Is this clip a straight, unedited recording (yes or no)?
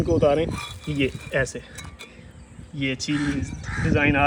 yes